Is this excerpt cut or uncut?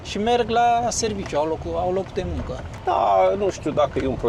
uncut